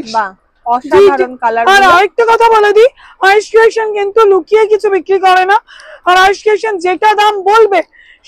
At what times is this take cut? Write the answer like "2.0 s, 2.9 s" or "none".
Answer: none